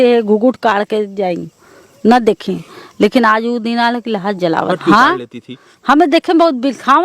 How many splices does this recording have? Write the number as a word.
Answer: one